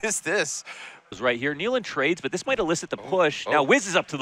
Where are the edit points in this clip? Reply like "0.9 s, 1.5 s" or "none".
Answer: 1.1 s